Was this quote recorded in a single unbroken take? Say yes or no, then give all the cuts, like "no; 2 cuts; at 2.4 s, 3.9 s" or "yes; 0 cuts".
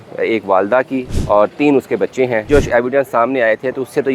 no; 2 cuts; at 1.1 s, 2.5 s